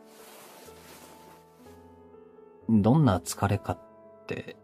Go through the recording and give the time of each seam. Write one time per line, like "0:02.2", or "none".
0:01.1